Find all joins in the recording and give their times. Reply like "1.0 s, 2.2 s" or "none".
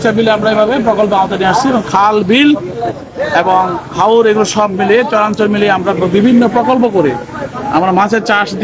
none